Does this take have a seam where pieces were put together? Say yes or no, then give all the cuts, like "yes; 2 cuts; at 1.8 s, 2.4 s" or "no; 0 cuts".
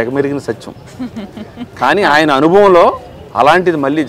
no; 0 cuts